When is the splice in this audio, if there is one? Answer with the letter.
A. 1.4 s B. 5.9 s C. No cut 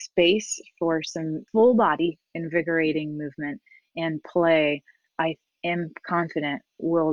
A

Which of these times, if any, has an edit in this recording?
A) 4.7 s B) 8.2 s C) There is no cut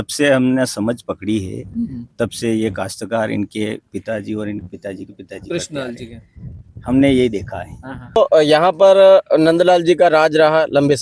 B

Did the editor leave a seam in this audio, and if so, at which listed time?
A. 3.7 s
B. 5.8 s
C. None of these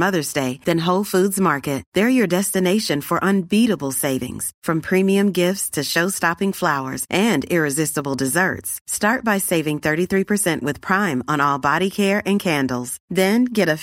C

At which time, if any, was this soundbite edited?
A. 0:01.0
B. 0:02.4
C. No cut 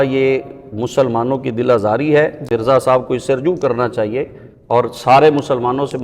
B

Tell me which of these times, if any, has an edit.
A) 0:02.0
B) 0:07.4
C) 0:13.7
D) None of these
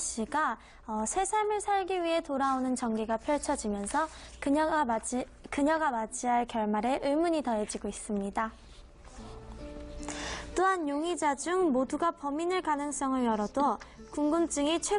B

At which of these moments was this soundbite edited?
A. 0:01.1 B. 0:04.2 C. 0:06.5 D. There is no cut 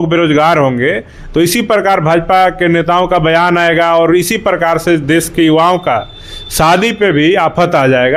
D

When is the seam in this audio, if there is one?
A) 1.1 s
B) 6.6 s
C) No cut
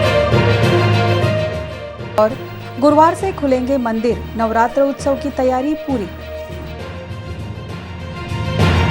A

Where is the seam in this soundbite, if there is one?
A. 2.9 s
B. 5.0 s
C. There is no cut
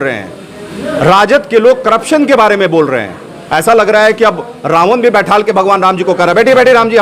C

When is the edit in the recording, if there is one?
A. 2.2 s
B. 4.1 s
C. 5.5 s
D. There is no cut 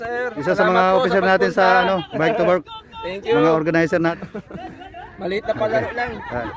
B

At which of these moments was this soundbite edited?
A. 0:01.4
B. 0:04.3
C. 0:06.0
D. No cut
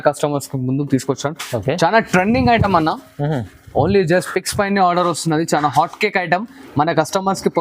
D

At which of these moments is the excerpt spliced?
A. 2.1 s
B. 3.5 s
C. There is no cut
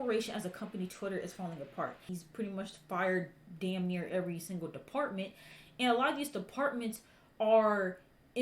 A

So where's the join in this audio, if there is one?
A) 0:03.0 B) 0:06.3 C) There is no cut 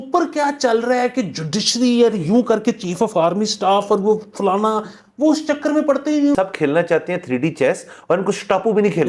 B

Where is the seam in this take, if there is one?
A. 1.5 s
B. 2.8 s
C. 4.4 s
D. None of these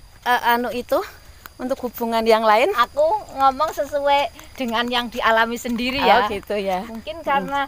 B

